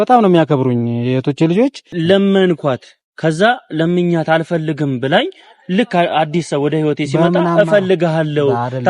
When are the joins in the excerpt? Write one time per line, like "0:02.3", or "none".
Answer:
0:01.9